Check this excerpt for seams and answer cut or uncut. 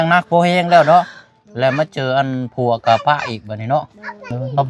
uncut